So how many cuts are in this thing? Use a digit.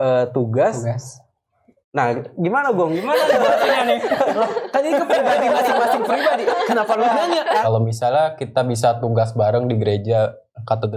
1